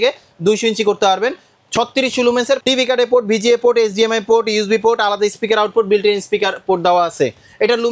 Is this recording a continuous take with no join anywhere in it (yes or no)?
no